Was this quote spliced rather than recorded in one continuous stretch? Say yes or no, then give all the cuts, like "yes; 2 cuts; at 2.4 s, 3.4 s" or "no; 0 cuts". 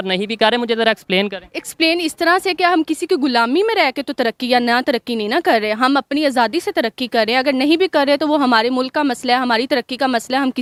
no; 0 cuts